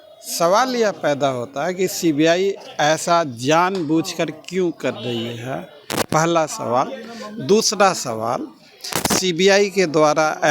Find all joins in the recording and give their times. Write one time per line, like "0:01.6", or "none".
none